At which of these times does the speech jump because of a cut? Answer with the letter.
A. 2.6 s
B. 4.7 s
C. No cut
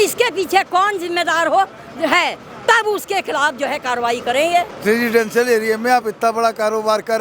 B